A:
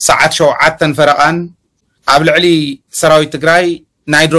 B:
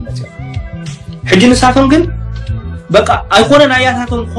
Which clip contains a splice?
A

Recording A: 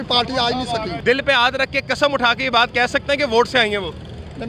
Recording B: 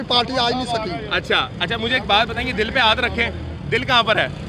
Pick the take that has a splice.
A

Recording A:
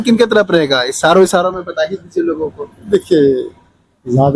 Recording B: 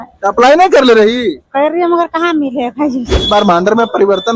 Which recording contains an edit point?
B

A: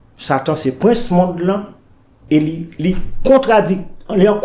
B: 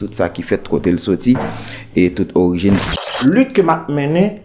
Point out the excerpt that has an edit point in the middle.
B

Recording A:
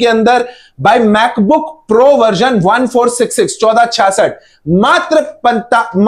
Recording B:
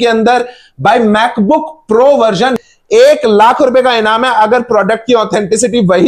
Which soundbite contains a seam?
B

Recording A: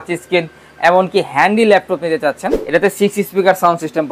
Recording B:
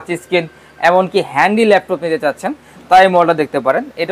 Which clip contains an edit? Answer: A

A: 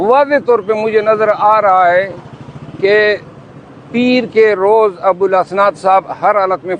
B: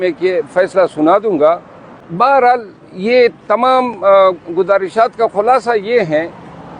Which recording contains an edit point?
B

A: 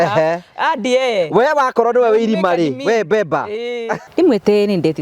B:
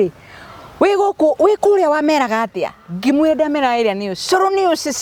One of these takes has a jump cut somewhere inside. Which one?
A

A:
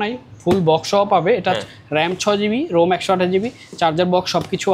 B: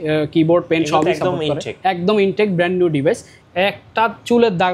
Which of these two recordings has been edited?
B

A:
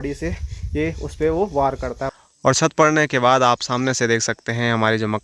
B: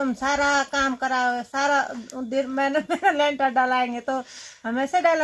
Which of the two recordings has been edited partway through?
A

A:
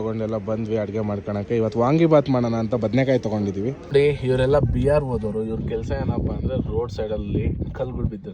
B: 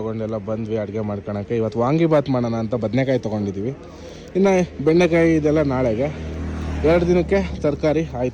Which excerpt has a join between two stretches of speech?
A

